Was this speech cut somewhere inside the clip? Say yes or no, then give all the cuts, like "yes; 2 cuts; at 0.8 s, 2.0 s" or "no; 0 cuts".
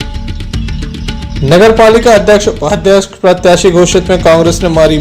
yes; 1 cut; at 1.4 s